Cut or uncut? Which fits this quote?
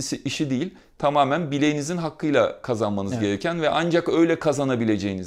uncut